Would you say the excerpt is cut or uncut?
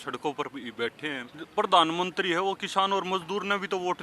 cut